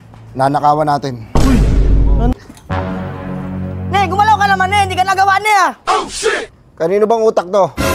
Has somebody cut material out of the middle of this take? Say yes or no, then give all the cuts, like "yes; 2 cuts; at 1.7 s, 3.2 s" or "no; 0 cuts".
yes; 1 cut; at 2.3 s